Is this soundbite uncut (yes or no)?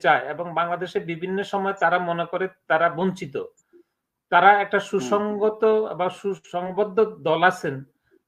yes